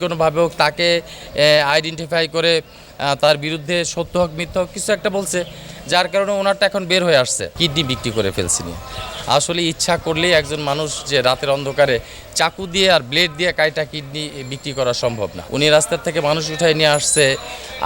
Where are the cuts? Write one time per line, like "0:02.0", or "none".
0:07.5
0:15.4